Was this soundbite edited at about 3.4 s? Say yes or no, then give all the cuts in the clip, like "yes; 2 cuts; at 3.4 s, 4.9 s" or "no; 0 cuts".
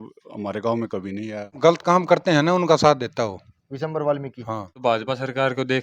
no; 2 cuts; at 1.5 s, 4.7 s